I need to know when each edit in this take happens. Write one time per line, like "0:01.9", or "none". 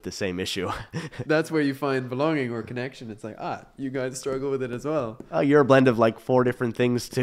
0:01.2